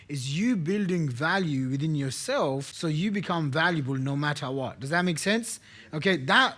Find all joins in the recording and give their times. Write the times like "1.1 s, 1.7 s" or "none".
2.7 s